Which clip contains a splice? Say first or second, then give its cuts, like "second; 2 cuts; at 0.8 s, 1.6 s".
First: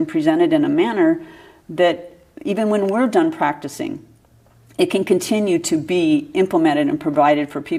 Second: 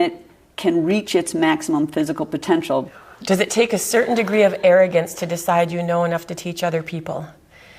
second; 1 cut; at 2.9 s